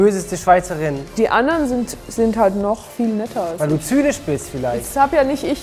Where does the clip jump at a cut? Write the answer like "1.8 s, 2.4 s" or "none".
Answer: 1.0 s

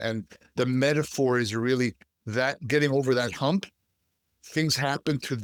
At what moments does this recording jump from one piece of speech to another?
none

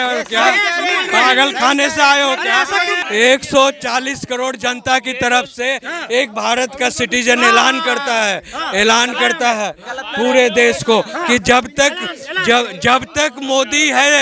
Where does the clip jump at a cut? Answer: 2.9 s

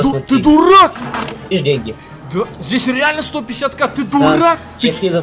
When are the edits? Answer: 1.4 s

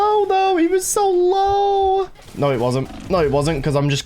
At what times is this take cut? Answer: 2.2 s

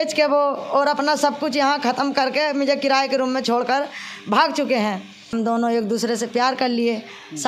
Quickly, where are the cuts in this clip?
5.3 s

